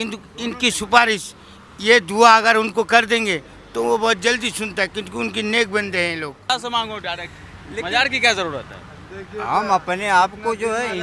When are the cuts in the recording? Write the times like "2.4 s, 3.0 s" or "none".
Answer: 6.5 s